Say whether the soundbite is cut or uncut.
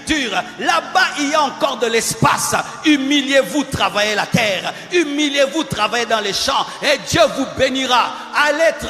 uncut